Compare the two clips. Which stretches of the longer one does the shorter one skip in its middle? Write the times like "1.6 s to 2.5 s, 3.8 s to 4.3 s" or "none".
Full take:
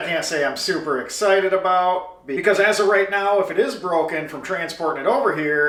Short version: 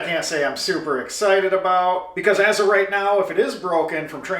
2.1 s to 2.3 s

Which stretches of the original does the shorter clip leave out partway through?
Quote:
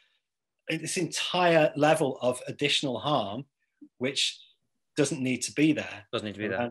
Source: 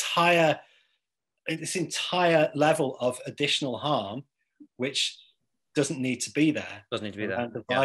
none

